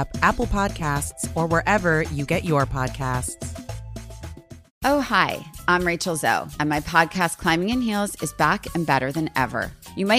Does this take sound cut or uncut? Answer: cut